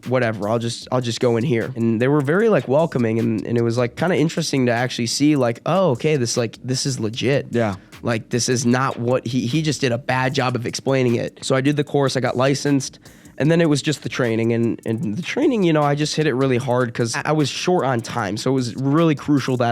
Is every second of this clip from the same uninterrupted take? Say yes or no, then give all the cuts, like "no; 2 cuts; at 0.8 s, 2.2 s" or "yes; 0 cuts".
no; 3 cuts; at 1.7 s, 11.4 s, 17.2 s